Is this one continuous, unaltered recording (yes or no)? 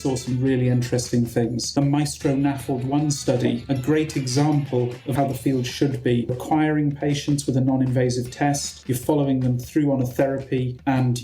no